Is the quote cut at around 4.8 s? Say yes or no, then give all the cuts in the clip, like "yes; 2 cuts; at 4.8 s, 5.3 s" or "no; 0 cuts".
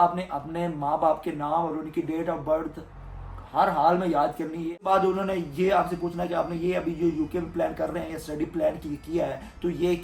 yes; 1 cut; at 4.8 s